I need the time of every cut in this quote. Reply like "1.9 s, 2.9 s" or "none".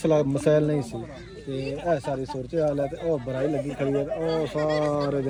none